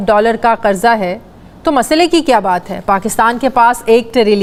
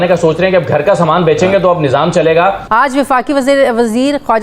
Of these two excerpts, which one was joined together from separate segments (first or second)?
second